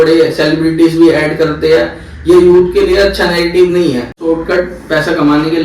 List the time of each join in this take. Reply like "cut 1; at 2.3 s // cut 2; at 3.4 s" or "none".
cut 1; at 4.2 s